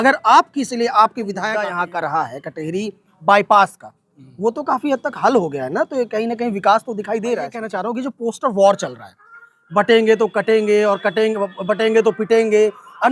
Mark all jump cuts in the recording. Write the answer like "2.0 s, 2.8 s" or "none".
1.7 s, 7.7 s